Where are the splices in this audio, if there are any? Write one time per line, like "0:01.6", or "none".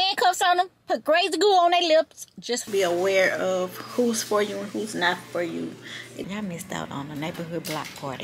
0:02.7
0:06.1